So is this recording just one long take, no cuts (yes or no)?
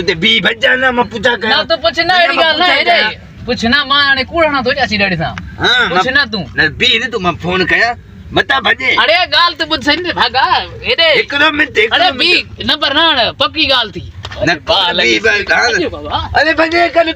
yes